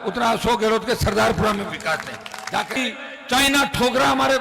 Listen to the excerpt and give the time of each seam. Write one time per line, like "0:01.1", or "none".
0:02.8